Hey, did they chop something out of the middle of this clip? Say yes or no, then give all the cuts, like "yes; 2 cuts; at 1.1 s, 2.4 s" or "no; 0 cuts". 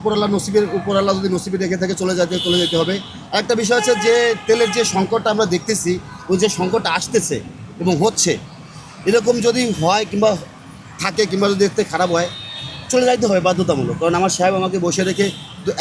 no; 0 cuts